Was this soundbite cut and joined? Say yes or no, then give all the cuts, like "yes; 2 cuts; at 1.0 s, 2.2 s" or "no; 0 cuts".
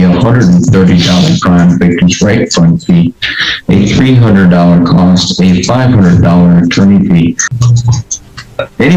yes; 1 cut; at 7.5 s